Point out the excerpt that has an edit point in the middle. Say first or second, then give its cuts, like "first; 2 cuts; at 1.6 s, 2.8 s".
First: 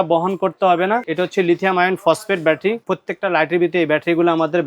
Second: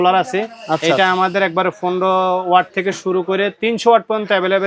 first; 2 cuts; at 1.1 s, 2.9 s